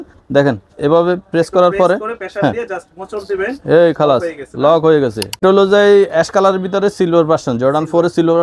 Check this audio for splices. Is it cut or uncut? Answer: cut